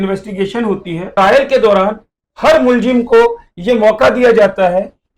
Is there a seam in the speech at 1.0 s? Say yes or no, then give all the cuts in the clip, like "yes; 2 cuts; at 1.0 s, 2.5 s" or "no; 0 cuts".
yes; 1 cut; at 1.0 s